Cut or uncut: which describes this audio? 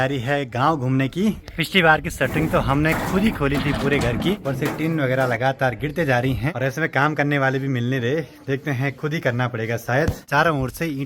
cut